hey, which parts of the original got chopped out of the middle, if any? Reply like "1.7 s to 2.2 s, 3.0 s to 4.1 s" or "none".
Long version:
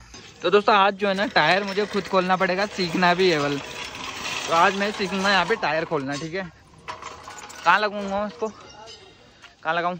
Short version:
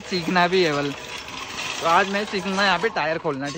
none